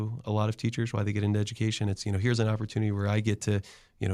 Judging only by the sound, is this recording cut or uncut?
uncut